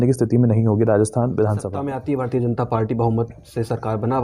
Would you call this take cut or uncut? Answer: cut